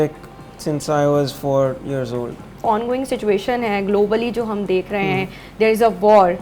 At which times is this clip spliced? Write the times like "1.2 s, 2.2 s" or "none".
2.7 s